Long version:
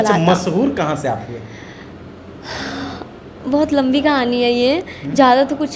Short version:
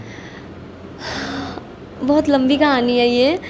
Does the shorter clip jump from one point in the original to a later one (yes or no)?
no